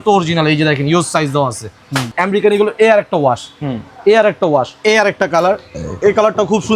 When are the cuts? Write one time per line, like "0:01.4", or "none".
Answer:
0:02.1
0:04.8